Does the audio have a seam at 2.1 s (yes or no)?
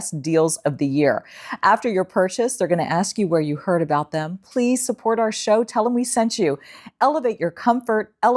no